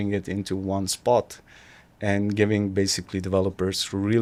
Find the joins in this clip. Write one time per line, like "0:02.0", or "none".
none